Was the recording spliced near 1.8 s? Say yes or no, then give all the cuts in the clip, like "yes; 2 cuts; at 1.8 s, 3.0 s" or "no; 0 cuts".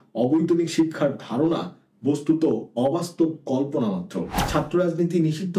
no; 1 cut; at 4.4 s